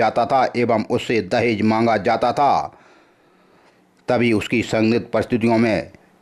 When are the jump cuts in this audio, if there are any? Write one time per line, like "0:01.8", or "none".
none